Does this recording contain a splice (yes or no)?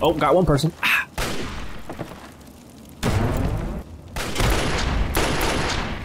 yes